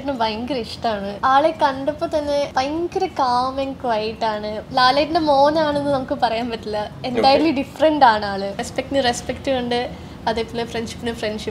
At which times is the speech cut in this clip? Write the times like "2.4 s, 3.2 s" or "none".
1.1 s, 2.5 s, 4.6 s, 8.7 s

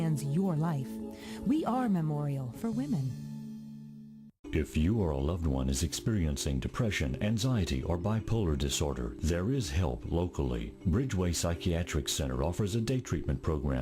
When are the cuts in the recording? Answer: 4.4 s

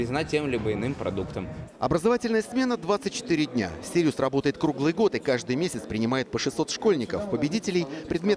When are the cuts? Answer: 5.0 s

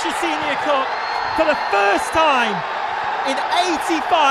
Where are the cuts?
none

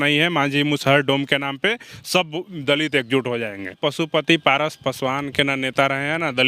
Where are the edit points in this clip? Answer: 3.7 s

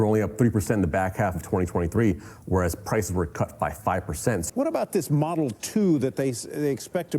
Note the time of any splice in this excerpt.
4.5 s

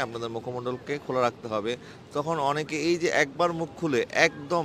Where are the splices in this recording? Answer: none

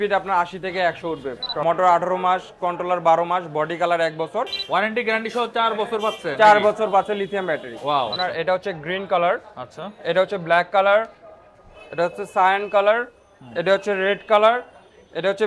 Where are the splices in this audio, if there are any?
1.6 s, 4.6 s, 8.1 s

